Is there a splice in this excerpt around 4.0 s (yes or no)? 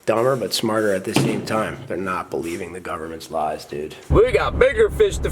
yes